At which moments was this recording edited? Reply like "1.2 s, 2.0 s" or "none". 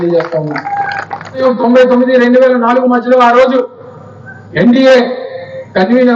1.4 s